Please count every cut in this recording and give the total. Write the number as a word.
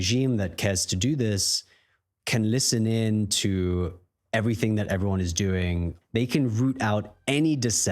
one